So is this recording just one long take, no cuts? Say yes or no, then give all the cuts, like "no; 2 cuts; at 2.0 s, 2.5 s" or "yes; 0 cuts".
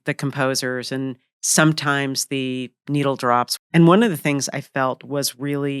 no; 1 cut; at 3.6 s